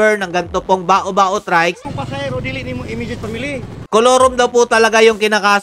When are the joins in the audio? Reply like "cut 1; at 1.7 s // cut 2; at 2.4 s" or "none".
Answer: cut 1; at 1.8 s